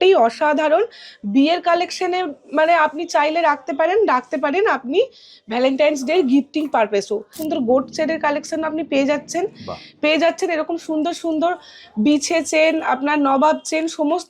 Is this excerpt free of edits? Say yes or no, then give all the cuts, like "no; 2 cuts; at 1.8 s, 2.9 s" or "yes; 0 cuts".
no; 1 cut; at 7.3 s